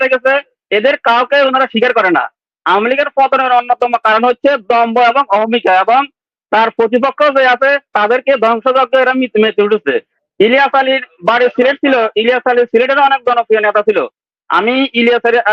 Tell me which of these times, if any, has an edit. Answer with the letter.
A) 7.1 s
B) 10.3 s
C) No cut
C